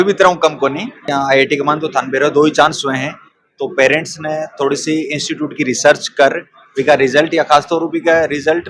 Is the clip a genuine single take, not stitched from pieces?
no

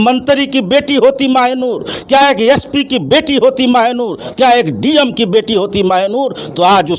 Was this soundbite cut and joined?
no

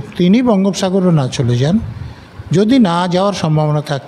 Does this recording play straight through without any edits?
yes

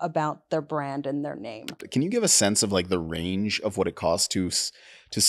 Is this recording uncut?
no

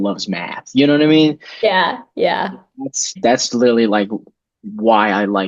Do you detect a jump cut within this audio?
no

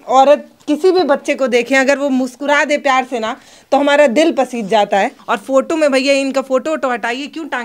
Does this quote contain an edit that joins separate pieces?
yes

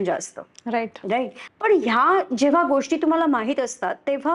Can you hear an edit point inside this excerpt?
yes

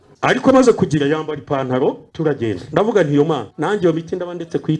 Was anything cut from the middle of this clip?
yes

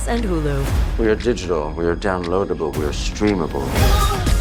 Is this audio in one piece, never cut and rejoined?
yes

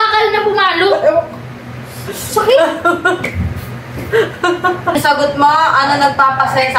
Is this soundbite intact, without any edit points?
no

